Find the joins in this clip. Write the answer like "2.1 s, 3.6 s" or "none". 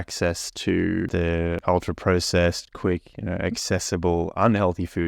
1.5 s, 3.1 s